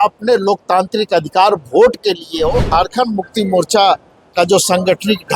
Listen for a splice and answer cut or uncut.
cut